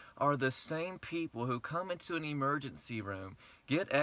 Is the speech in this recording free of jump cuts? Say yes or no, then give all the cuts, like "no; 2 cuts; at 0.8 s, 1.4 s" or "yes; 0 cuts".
yes; 0 cuts